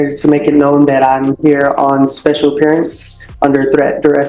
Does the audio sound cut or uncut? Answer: uncut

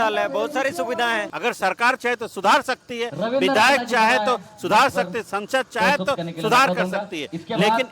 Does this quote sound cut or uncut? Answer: cut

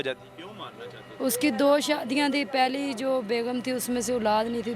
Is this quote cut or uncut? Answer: uncut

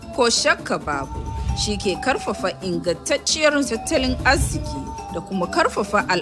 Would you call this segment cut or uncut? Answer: uncut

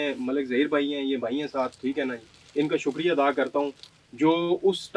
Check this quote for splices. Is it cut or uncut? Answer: uncut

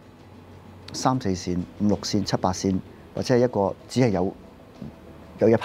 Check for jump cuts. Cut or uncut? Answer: uncut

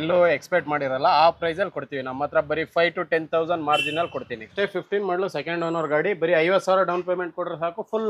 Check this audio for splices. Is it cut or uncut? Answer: cut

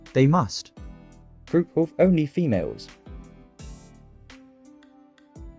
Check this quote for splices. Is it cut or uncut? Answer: uncut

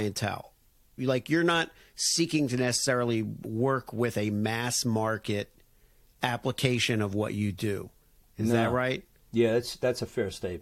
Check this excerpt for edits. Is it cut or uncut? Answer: uncut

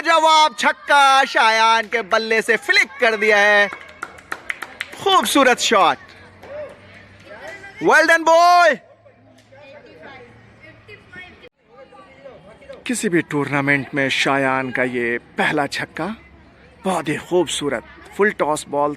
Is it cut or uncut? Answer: uncut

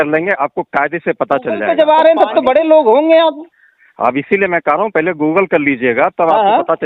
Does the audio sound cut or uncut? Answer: cut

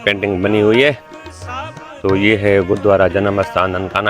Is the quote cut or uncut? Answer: uncut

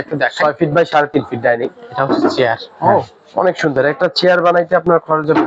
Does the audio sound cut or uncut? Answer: uncut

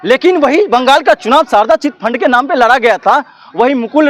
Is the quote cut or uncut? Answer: uncut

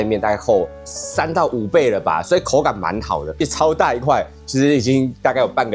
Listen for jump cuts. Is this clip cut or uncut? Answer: cut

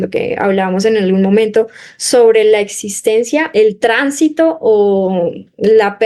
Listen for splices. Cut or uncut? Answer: cut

